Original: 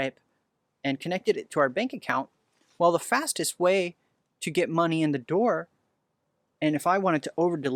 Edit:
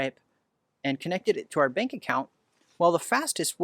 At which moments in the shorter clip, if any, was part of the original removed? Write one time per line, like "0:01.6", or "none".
none